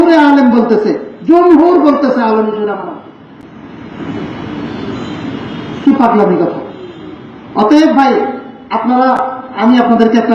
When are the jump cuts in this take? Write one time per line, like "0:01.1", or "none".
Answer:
none